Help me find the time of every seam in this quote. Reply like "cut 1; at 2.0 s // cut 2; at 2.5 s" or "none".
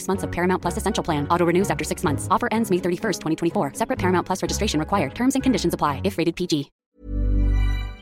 cut 1; at 7.0 s

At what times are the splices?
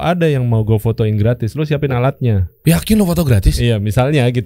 cut 1; at 2.6 s

